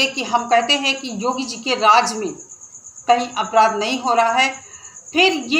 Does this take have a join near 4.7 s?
yes; 1 cut; at 4.7 s

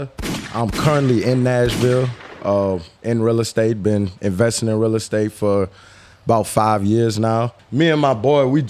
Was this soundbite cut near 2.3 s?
no; 1 cut; at 7.6 s

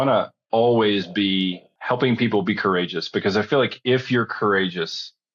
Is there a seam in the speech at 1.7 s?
yes; 1 cut; at 1.7 s

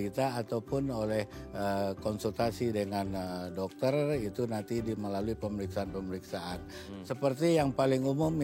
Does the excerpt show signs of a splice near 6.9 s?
no; 0 cuts

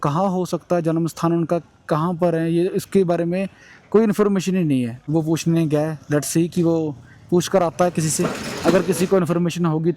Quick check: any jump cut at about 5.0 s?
yes; 1 cut; at 5.0 s

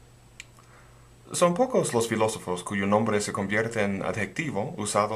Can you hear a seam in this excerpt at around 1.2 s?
no; 1 cut; at 3.9 s

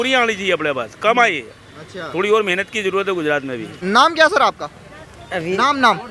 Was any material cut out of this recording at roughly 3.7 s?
yes; 1 cut; at 3.7 s

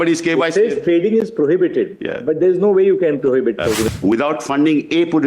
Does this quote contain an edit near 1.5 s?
no; 1 cut; at 3.9 s

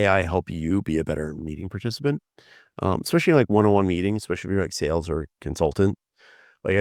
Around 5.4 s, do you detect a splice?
no; 0 cuts

